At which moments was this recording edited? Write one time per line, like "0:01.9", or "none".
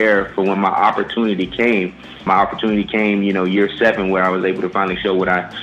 0:02.2